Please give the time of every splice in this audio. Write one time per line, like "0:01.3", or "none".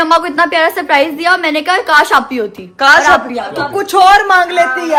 none

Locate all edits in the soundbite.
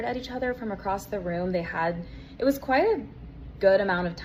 none

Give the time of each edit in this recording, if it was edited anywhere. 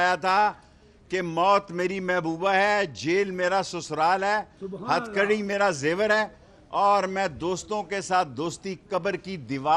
none

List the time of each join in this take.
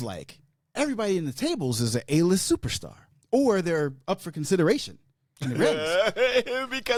none

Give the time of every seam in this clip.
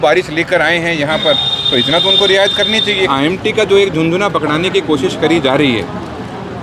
0:03.1

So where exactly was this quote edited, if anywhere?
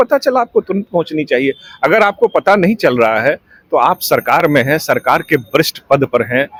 none

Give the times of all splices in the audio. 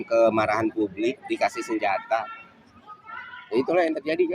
none

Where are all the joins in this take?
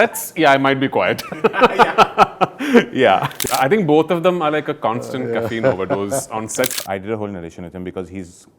0:03.3
0:06.8

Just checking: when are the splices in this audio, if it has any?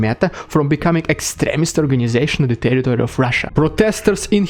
0:03.4

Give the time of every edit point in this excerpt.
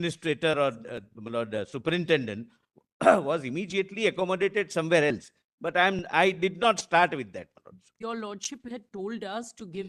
0:07.9

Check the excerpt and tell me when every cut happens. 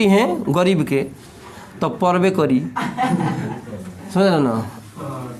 none

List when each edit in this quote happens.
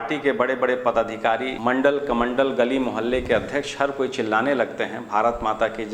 0:01.5

